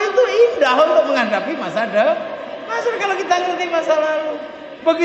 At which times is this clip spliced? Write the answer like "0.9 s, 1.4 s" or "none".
none